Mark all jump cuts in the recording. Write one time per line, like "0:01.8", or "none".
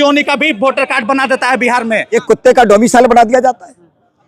0:02.1